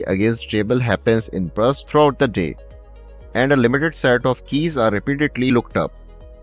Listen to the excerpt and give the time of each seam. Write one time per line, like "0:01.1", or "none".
none

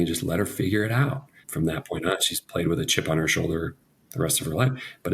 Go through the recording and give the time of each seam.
0:01.4

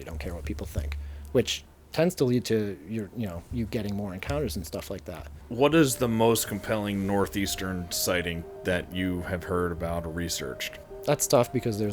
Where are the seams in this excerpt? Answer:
0:05.3
0:10.9

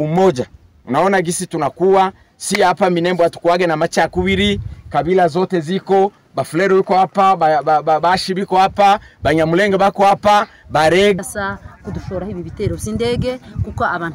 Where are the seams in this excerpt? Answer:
0:11.2

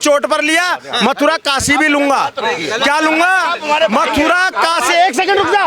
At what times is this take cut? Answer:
none

